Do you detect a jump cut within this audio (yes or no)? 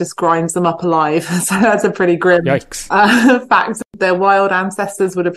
yes